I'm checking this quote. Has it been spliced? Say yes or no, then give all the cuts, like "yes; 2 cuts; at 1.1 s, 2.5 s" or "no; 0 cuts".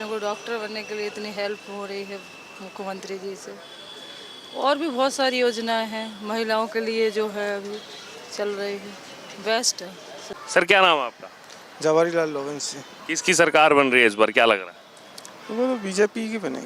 yes; 1 cut; at 10.3 s